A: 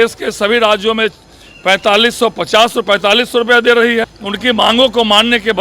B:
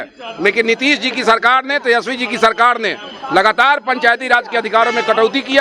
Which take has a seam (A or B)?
A